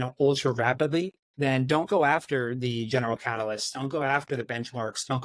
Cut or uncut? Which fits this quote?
cut